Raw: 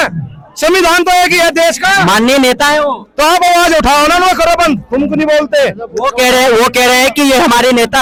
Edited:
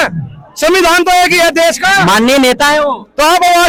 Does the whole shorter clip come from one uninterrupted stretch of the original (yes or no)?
yes